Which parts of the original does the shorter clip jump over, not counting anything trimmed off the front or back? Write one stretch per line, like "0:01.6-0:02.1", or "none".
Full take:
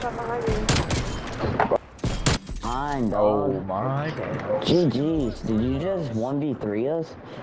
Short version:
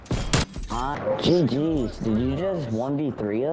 0:02.9-0:04.4